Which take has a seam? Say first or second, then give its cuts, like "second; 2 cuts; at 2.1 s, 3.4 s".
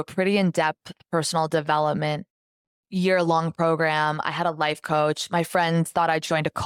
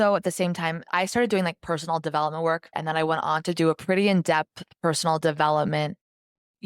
second; 2 cuts; at 0.8 s, 2.7 s